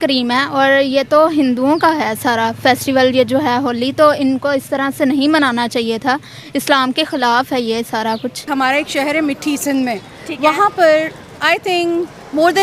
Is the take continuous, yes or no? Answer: no